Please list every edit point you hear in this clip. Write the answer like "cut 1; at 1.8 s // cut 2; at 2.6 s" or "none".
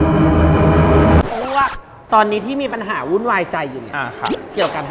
cut 1; at 1.9 s